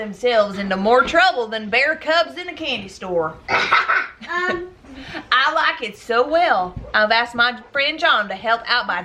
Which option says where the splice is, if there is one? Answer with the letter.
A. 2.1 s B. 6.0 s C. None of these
C